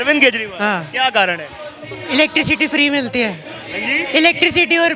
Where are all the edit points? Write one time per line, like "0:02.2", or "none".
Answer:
none

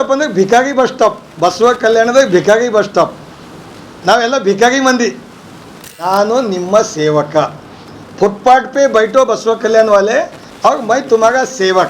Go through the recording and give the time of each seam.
0:06.0

